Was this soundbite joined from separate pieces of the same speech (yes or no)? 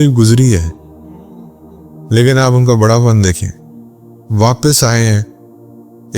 yes